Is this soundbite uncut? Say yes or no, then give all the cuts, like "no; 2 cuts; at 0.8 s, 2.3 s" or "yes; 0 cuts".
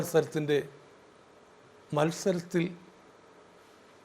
yes; 0 cuts